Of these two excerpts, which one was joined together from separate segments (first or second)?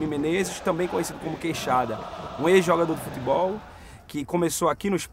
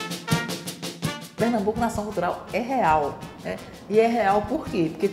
second